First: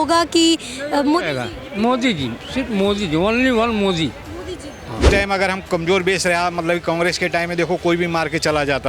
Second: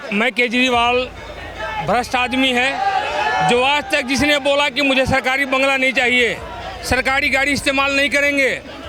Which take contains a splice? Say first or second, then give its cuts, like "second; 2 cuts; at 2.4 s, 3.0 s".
first; 1 cut; at 5.0 s